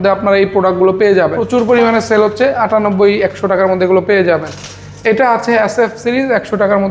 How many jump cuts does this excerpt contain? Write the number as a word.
one